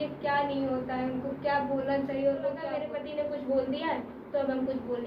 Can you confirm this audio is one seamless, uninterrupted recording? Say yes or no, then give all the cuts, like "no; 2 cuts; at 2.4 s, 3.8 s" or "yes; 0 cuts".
no; 1 cut; at 2.8 s